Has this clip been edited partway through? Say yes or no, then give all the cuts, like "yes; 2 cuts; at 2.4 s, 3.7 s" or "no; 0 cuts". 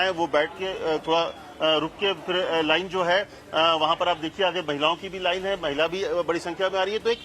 yes; 1 cut; at 6.1 s